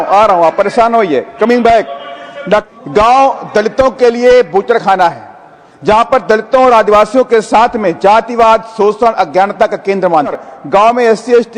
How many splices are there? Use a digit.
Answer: 2